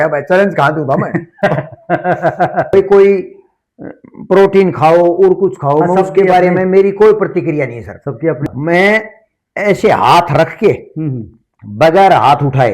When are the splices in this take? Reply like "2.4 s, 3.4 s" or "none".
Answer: 2.7 s, 8.4 s